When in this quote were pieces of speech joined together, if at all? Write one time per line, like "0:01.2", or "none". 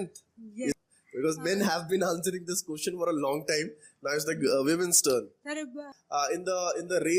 0:00.8
0:05.9